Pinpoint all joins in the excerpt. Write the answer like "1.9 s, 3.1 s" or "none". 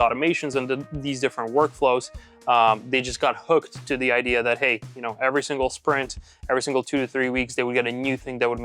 none